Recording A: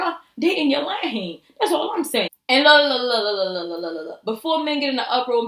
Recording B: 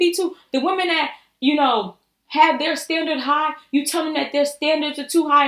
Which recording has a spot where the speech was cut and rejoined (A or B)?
A